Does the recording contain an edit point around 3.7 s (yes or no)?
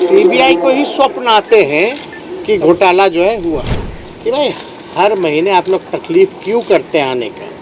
yes